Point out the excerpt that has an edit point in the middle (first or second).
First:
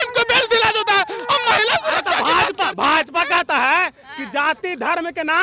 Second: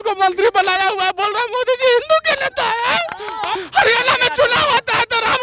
second